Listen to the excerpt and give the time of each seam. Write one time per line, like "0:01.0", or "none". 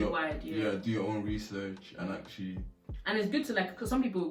none